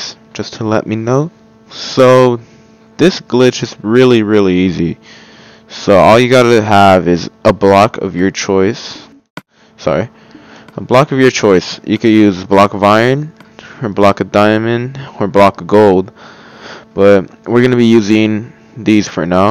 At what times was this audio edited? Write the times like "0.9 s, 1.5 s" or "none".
3.7 s